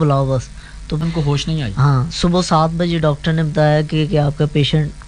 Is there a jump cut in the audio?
yes; 1 cut; at 1.0 s

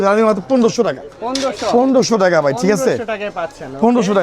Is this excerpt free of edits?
yes; 0 cuts

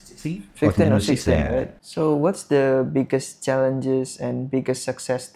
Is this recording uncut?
no; 1 cut; at 1.8 s

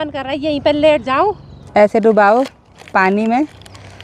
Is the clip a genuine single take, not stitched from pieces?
no; 1 cut; at 1.5 s

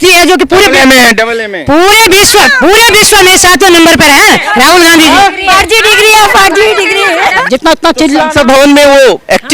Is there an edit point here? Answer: yes; 1 cut; at 7.4 s

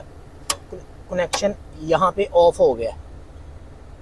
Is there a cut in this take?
no; 0 cuts

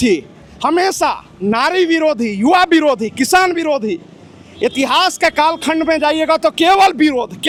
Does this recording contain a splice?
no; 0 cuts

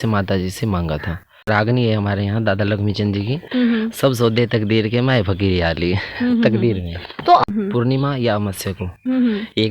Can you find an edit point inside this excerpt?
yes; 2 cuts; at 1.4 s, 7.5 s

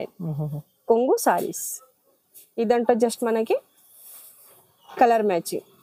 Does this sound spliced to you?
no; 0 cuts

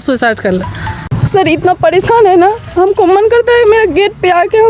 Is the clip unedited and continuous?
no; 1 cut; at 0.9 s

